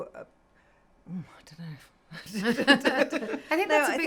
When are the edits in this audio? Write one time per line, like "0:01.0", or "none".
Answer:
none